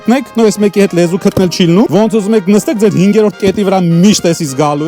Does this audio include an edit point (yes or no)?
yes